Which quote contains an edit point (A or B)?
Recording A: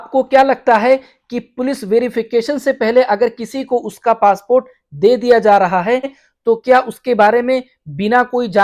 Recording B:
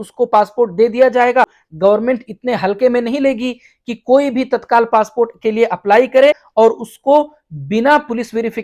B